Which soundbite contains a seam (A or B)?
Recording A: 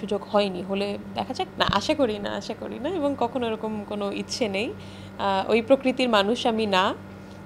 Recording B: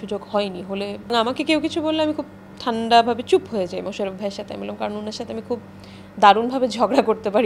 B